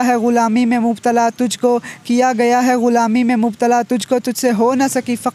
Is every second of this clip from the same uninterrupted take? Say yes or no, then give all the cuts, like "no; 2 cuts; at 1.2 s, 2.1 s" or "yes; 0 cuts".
yes; 0 cuts